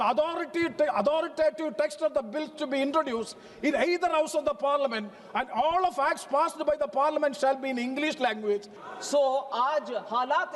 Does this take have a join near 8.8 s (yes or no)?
yes